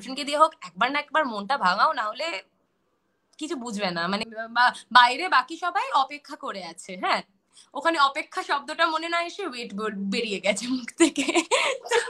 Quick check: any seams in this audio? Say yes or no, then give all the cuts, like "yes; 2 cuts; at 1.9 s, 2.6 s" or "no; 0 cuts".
yes; 1 cut; at 4.2 s